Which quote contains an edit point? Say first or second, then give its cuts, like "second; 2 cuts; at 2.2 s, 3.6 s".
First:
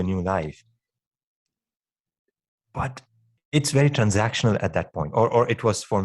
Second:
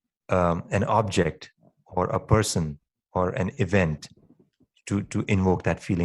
first; 1 cut; at 3.4 s